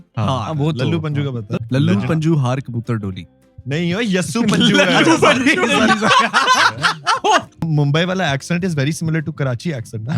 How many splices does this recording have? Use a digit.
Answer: 2